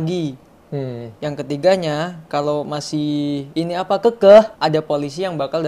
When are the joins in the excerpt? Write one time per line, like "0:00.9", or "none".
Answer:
0:03.5
0:04.5